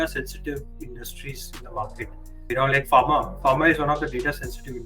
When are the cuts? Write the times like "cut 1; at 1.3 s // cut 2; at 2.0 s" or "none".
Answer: cut 1; at 2.5 s

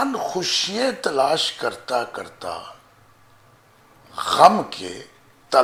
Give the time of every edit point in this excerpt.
none

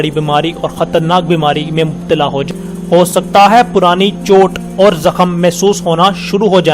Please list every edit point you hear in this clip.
cut 1; at 2.5 s

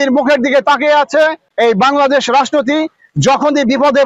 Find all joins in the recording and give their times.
cut 1; at 1.5 s

